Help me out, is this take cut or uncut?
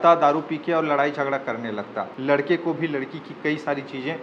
cut